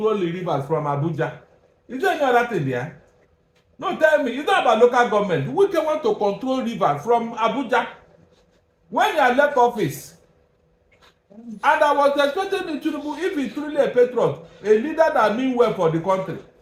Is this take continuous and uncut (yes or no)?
yes